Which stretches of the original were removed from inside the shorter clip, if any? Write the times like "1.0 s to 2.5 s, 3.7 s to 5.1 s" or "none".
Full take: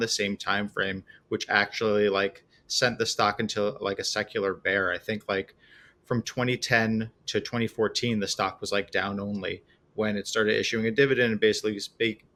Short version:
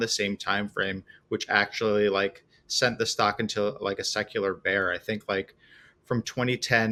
none